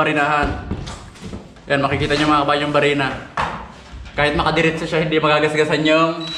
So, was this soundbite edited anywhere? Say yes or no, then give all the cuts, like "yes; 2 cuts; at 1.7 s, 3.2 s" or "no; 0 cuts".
no; 0 cuts